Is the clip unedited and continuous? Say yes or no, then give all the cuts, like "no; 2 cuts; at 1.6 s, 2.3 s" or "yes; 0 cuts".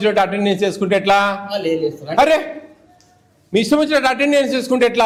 yes; 0 cuts